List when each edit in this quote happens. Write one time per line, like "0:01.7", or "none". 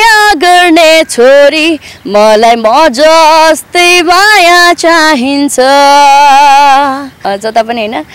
0:07.2

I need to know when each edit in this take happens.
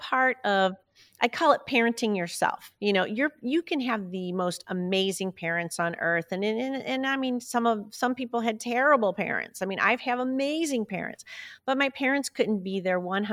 none

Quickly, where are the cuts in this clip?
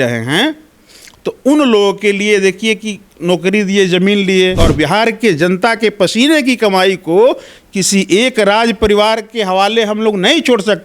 0:04.6

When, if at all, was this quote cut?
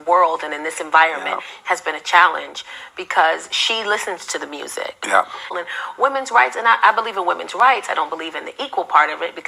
0:05.5

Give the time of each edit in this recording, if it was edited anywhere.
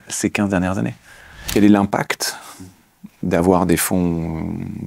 0:01.3

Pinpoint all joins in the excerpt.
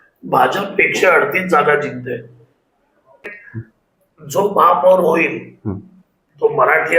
0:03.3

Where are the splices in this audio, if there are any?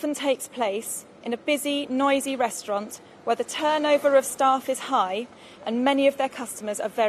none

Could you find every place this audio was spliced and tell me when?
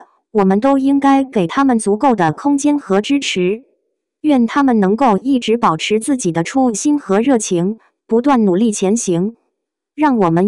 0:01.4

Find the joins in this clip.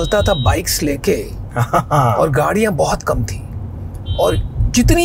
none

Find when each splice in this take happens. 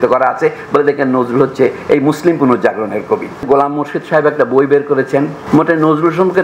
0:03.4
0:05.4

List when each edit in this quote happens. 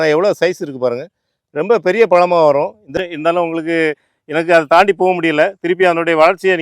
0:02.9

